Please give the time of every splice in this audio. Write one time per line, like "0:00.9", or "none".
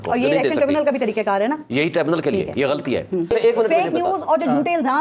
0:03.3